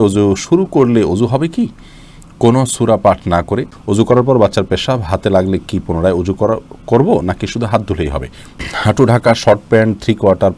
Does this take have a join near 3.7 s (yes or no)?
yes